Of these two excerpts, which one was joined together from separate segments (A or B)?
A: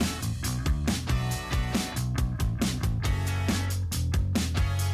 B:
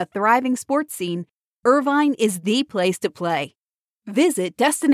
A